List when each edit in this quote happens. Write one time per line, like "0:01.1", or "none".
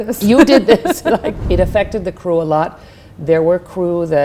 0:01.4